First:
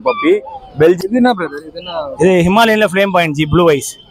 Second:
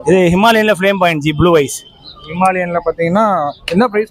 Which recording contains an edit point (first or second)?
first